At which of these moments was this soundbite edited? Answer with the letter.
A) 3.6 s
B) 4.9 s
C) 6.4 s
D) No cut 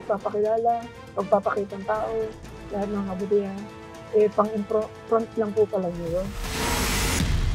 C